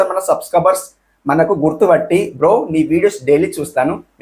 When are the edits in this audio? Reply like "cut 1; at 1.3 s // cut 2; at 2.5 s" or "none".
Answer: none